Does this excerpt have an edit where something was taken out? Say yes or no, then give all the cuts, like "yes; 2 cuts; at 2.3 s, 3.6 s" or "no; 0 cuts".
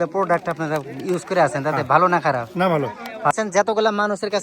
yes; 1 cut; at 3.3 s